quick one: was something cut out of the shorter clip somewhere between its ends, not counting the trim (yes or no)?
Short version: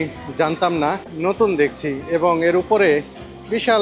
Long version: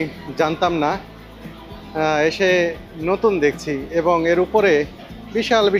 yes